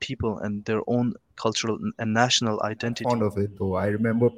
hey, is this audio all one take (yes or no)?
no